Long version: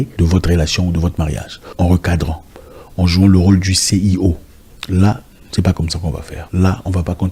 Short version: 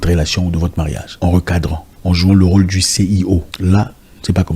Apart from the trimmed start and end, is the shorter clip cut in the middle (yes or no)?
yes